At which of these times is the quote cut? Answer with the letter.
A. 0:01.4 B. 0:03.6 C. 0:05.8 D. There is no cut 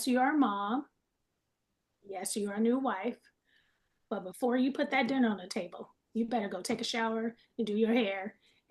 D